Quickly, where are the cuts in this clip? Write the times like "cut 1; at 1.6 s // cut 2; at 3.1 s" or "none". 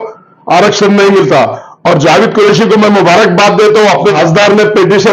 cut 1; at 4.1 s